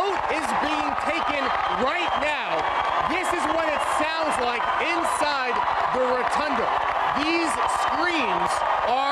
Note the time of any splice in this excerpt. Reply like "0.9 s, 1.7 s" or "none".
none